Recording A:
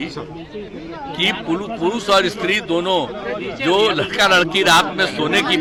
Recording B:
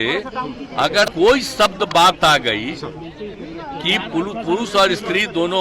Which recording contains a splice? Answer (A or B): B